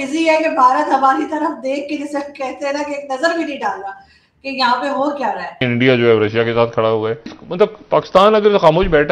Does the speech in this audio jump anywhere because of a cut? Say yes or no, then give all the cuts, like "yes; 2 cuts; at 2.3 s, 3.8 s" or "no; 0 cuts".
yes; 2 cuts; at 5.6 s, 7.4 s